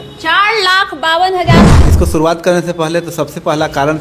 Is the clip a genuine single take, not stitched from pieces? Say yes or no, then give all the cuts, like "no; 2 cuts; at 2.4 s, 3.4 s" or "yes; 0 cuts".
no; 1 cut; at 1.7 s